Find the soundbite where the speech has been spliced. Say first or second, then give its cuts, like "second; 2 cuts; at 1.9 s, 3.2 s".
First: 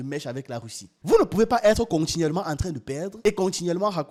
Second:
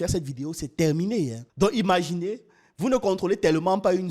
second; 1 cut; at 1.4 s